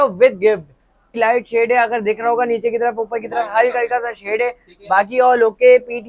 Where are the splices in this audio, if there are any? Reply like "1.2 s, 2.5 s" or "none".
1.1 s